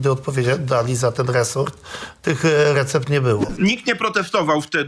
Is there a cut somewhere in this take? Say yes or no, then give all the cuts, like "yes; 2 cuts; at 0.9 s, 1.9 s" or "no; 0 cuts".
yes; 1 cut; at 3.5 s